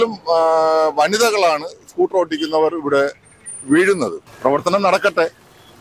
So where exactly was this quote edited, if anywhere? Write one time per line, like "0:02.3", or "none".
0:04.2